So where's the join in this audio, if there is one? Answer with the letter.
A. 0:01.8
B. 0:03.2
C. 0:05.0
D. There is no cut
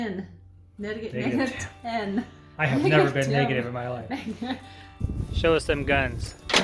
C